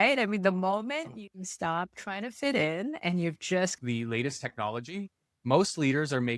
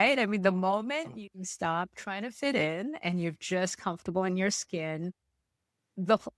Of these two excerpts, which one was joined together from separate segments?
first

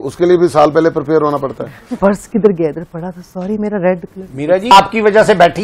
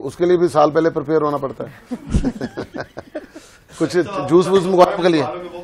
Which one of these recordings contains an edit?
first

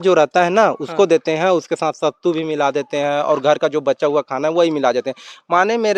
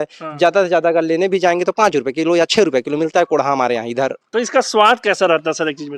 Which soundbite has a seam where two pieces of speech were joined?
second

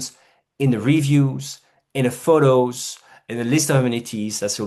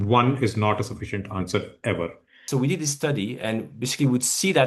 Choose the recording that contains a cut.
second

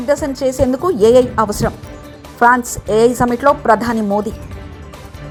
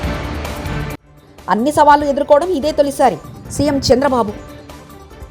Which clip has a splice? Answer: second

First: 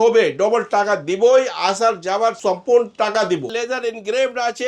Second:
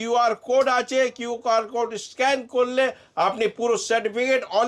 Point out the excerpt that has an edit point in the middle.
first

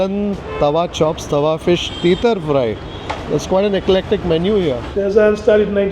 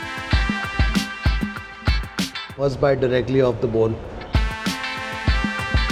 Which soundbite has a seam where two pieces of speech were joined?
first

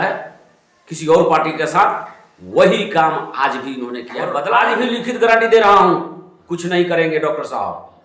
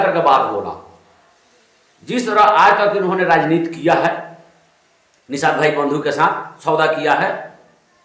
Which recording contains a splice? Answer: first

